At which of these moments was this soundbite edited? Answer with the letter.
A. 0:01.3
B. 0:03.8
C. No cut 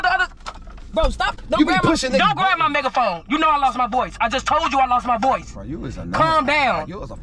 C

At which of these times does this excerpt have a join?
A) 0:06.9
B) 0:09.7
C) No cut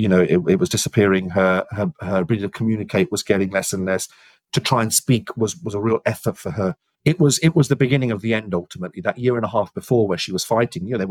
A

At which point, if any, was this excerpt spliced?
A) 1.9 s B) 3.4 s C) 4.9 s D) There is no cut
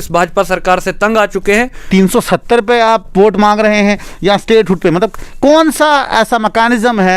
A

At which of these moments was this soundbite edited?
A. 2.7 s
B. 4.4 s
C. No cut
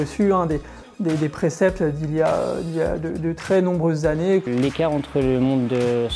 B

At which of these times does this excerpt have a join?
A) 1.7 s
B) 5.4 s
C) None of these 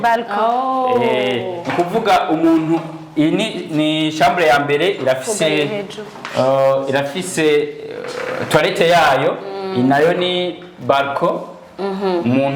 C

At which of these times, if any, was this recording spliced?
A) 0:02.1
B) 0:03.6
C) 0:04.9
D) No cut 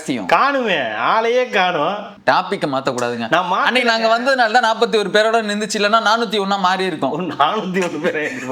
A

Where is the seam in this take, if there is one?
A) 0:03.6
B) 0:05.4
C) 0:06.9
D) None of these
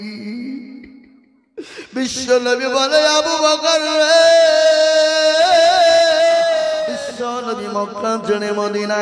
C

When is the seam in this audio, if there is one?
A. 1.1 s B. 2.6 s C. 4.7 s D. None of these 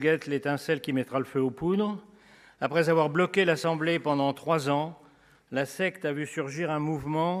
D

